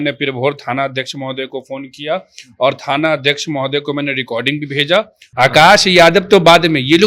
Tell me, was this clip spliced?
yes; 1 cut; at 5.2 s

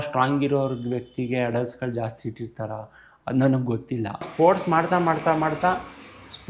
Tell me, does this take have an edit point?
yes; 1 cut; at 4.3 s

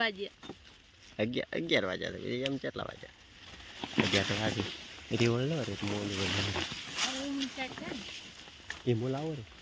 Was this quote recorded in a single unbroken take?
yes; 0 cuts

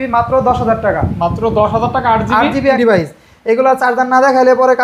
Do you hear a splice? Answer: yes; 1 cut; at 2.8 s

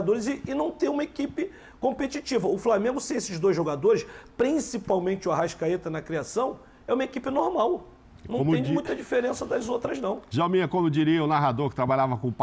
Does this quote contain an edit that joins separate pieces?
no; 0 cuts

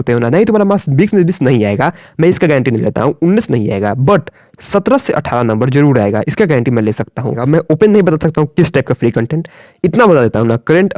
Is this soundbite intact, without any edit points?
no; 1 cut; at 7.4 s

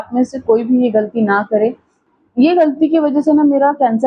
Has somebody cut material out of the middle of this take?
yes; 1 cut; at 2.0 s

